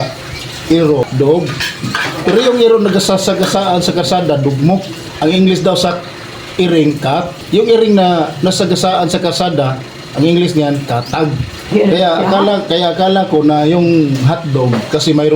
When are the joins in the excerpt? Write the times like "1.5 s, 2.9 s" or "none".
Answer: 1.0 s, 5.0 s, 7.4 s, 11.7 s